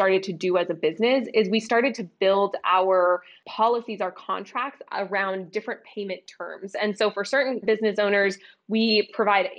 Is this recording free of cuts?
no; 1 cut; at 3.4 s

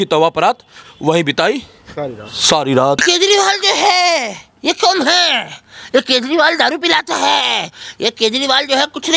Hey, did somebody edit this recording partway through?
yes; 1 cut; at 3.0 s

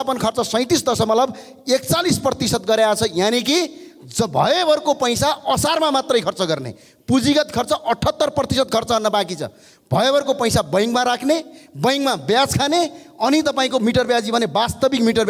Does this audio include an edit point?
no; 0 cuts

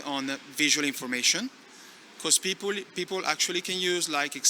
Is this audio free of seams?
yes; 0 cuts

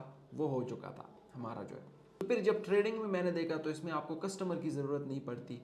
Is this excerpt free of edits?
no; 1 cut; at 2.2 s

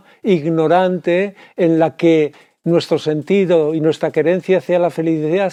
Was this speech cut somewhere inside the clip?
no; 0 cuts

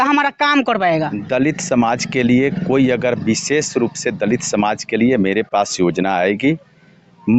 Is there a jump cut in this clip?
no; 0 cuts

